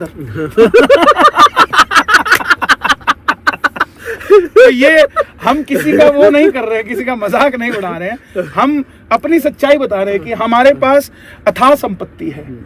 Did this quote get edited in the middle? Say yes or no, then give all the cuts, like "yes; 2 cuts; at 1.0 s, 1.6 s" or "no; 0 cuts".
no; 0 cuts